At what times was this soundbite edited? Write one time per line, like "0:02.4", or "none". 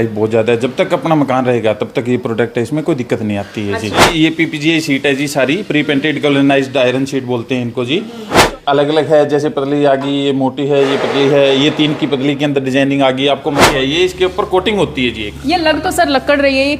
0:04.1
0:08.5
0:13.6